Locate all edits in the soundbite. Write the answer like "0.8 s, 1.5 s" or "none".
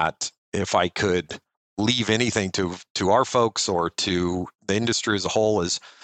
4.6 s